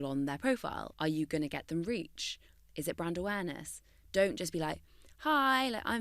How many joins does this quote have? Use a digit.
1